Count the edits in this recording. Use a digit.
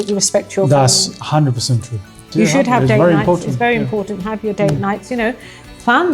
1